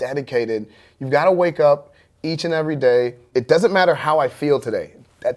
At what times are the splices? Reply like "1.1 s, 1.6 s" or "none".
3.2 s